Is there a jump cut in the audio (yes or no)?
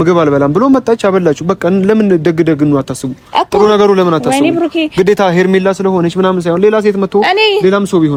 no